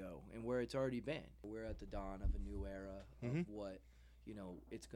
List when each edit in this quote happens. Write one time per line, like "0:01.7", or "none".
0:01.4